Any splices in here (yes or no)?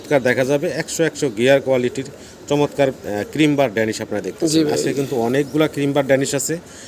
no